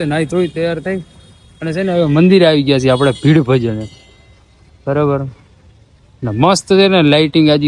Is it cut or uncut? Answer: uncut